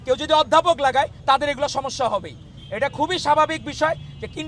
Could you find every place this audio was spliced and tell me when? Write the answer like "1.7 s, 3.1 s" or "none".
none